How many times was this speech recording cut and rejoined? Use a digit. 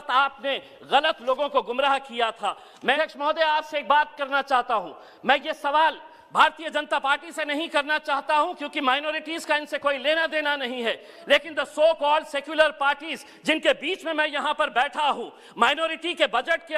1